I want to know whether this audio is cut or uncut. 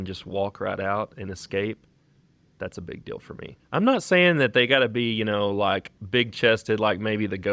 cut